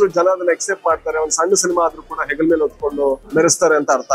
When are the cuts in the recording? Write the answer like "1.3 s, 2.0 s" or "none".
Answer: 3.2 s